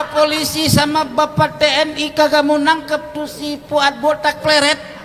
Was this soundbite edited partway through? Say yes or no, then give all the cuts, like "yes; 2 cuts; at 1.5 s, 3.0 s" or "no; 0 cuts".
no; 0 cuts